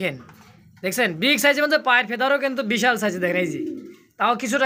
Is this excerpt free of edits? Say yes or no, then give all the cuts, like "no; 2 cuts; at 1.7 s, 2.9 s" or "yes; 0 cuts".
yes; 0 cuts